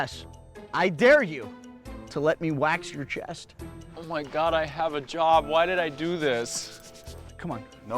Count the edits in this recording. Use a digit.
1